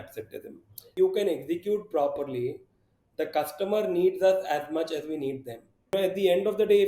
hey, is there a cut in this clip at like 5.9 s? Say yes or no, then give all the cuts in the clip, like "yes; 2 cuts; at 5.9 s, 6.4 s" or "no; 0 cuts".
yes; 2 cuts; at 0.9 s, 5.9 s